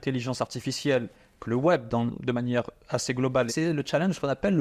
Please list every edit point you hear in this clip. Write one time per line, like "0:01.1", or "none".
0:03.5